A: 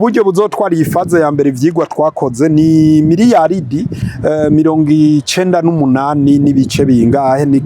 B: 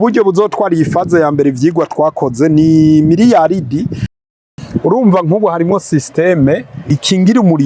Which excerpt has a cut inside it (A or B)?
B